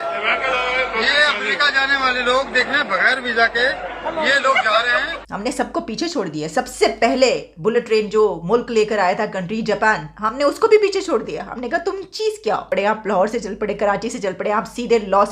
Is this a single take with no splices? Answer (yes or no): no